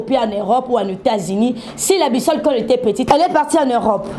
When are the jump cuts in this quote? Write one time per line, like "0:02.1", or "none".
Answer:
0:03.1